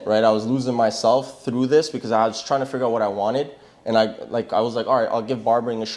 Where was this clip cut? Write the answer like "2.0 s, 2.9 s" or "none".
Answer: none

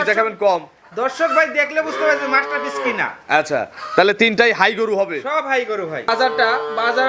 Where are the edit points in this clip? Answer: 6.1 s

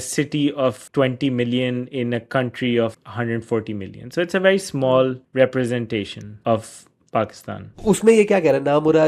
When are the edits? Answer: 0.8 s, 3.0 s, 5.2 s, 6.2 s, 7.7 s

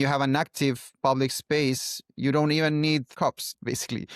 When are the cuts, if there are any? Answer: 3.1 s

